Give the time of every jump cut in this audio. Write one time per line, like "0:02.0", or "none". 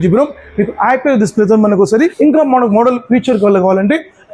0:02.1